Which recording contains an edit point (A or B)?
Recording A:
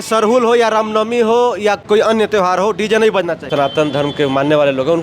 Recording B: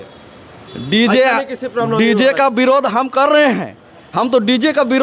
A